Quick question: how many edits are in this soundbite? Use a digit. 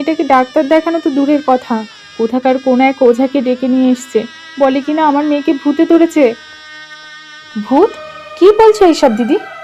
0